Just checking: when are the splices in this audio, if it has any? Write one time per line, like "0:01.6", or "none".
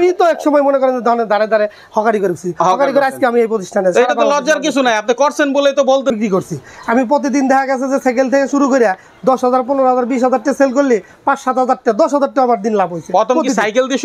0:06.2